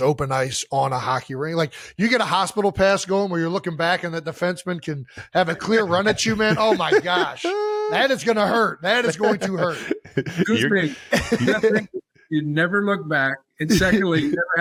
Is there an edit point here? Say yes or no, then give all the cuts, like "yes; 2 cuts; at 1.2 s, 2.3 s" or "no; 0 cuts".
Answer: no; 0 cuts